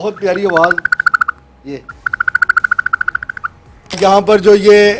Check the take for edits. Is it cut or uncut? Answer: cut